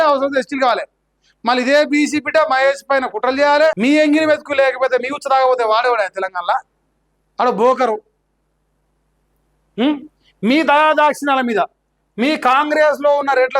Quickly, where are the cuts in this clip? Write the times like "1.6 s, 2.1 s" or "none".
3.8 s